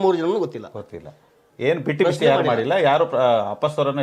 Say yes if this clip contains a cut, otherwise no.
yes